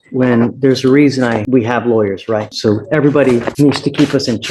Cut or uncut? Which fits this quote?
cut